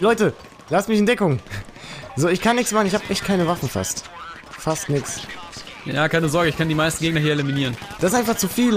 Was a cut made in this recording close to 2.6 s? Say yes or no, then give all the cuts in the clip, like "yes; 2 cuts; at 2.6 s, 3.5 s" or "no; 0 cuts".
no; 1 cut; at 7.8 s